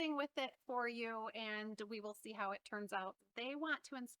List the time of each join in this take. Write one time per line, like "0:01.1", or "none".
0:03.2